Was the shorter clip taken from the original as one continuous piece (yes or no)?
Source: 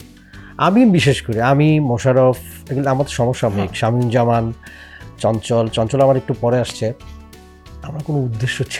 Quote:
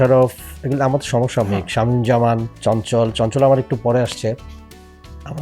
no